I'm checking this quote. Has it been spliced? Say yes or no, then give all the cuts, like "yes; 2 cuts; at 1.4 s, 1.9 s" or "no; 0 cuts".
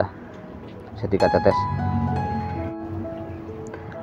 no; 0 cuts